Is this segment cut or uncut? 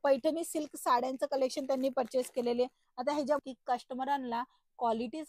cut